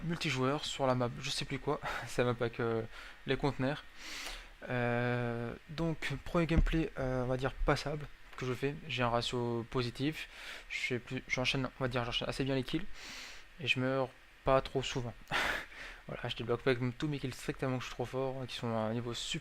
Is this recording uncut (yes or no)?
no